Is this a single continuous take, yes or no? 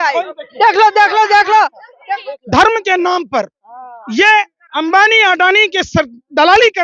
no